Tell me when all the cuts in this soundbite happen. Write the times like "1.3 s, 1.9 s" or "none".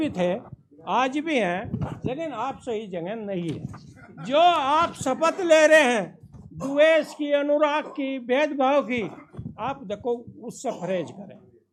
none